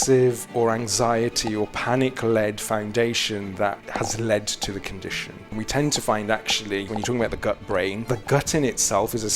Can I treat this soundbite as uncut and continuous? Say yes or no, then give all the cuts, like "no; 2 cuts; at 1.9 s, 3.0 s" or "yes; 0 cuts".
no; 4 cuts; at 3.8 s, 5.5 s, 6.9 s, 8.1 s